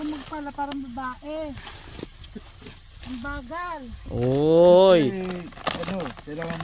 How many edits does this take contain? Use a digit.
0